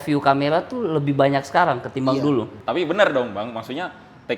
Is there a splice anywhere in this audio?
yes; 1 cut; at 2.5 s

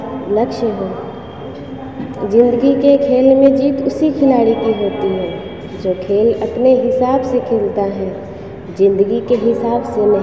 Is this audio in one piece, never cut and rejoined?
yes; 0 cuts

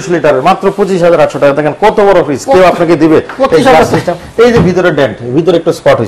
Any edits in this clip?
no; 0 cuts

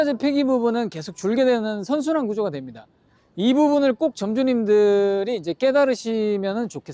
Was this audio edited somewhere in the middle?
no; 0 cuts

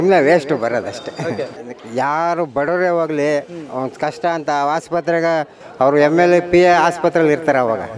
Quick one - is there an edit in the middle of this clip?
yes; 1 cut; at 1.6 s

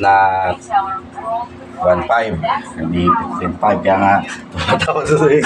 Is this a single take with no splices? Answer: yes; 0 cuts

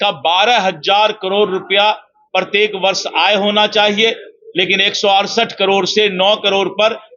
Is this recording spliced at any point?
no; 0 cuts

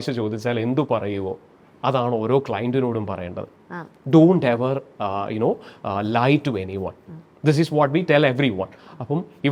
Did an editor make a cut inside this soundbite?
no; 0 cuts

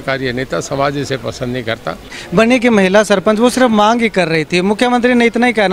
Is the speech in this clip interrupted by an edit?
yes; 1 cut; at 2.2 s

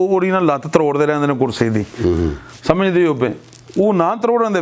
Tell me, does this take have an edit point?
no; 0 cuts

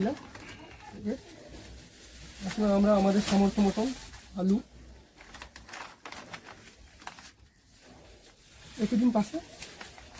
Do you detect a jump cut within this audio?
no; 0 cuts

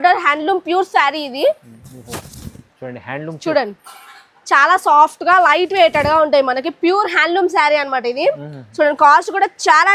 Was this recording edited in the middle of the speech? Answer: no; 0 cuts

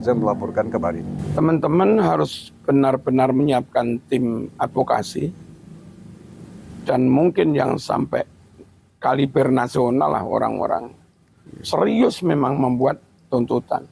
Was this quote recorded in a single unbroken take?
no; 1 cut; at 1.2 s

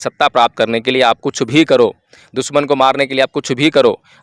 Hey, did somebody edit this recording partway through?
no; 0 cuts

